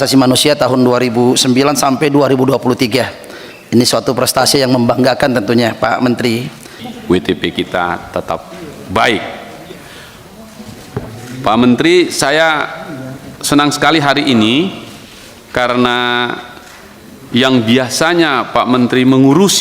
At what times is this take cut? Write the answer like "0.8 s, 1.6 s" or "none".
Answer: 6.9 s